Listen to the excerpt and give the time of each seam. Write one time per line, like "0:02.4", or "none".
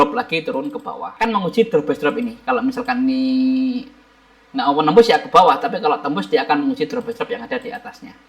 0:01.1